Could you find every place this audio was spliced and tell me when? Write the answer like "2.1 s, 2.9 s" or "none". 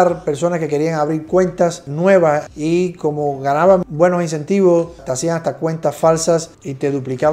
none

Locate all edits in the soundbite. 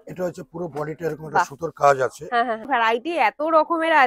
2.6 s

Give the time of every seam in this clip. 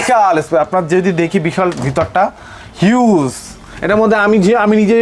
none

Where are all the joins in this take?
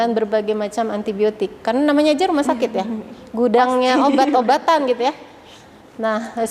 none

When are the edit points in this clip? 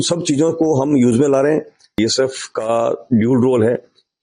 2.0 s

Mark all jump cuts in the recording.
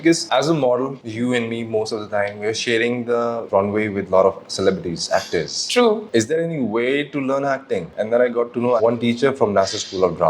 6.0 s, 8.8 s

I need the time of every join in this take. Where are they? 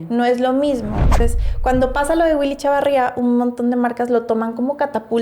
1.2 s

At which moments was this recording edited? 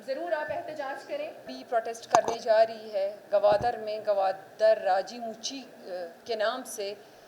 1.6 s

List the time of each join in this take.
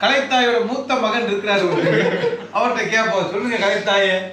none

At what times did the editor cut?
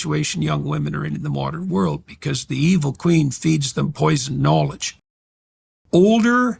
5.4 s

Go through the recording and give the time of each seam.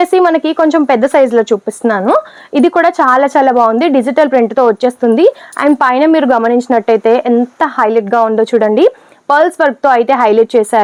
none

